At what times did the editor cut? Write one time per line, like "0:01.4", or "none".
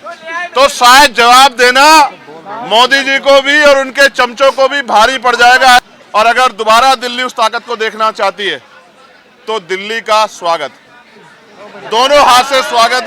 0:05.9